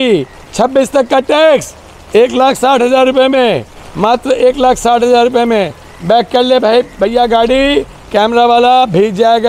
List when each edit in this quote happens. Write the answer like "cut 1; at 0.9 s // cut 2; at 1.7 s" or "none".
none